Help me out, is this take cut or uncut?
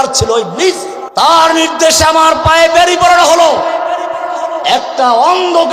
cut